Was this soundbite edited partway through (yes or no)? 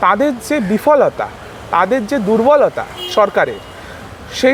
no